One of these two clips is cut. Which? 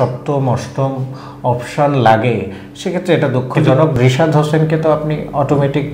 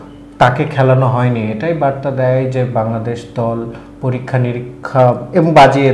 first; 1 cut; at 3.9 s

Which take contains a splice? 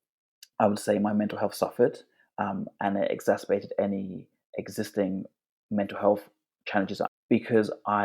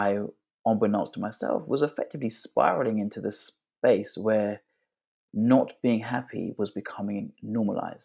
first; 1 cut; at 7.1 s

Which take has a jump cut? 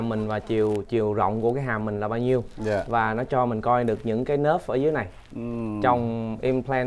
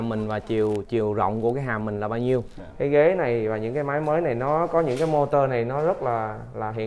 second; 1 cut; at 2.5 s

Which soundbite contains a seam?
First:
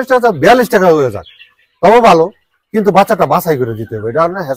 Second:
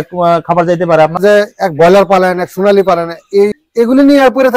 second; 2 cuts; at 1.2 s, 3.6 s

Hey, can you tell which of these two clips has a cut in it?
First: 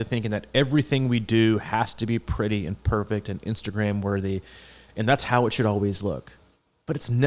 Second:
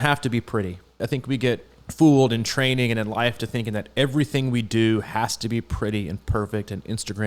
second; 2 cuts; at 1.0 s, 1.8 s

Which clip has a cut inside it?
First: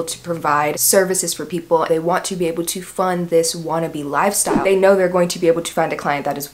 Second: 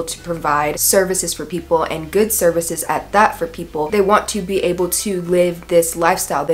first; 2 cuts; at 1.9 s, 4.6 s

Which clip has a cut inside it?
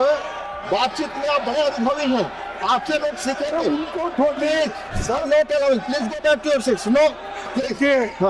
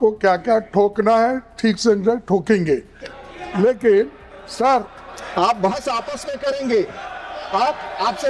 first; 1 cut; at 4.9 s

